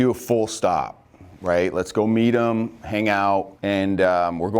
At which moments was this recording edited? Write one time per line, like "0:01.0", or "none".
0:03.5

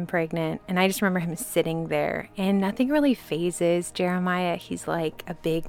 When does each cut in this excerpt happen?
none

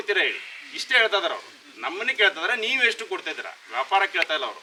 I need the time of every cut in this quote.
none

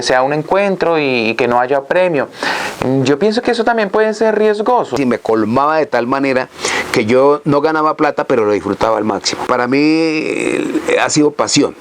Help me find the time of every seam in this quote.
0:04.9
0:09.5

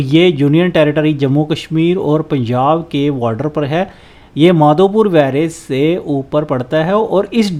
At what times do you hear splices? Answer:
none

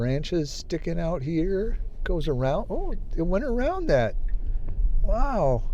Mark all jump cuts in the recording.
none

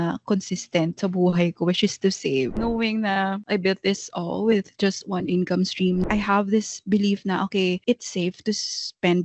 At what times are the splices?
0:02.5
0:03.4
0:06.0
0:07.8

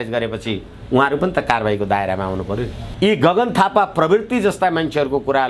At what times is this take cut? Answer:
0:02.8

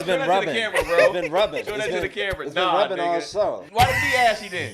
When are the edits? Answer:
0:03.6

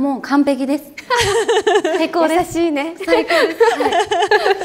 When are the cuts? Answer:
none

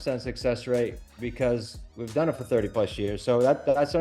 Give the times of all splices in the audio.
none

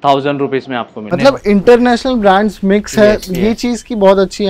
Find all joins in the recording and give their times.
0:01.1

